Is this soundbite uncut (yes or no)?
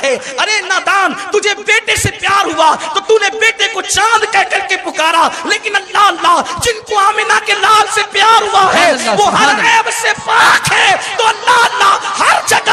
yes